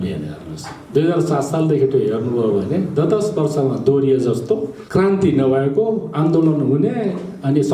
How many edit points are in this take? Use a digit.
1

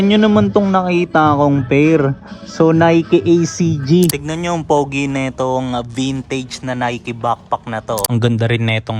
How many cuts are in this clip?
2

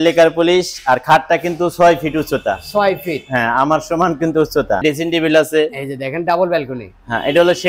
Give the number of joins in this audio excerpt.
1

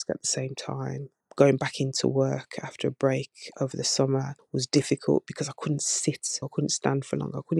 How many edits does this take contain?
2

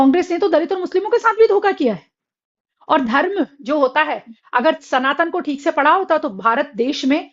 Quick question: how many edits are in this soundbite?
0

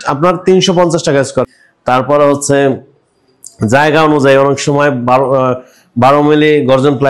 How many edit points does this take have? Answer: 1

